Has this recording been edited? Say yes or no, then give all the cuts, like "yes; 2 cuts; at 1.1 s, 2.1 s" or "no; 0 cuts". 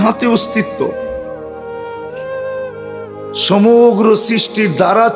yes; 2 cuts; at 0.9 s, 3.4 s